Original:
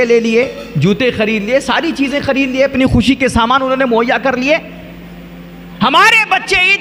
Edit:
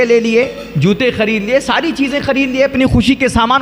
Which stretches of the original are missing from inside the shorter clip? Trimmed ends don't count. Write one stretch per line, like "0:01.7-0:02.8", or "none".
none